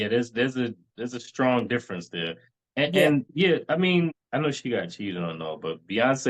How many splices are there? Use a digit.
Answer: 2